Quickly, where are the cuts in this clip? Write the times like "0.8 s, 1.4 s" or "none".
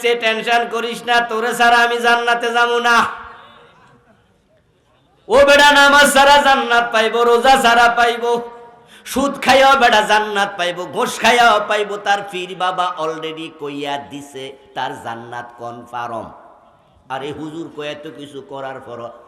none